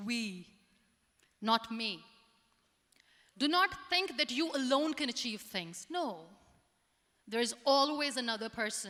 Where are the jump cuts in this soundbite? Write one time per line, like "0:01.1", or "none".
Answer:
none